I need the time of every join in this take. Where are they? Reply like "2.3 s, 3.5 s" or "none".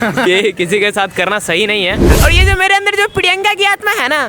2.2 s